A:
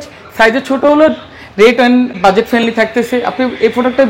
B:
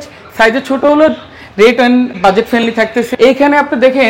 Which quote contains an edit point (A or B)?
B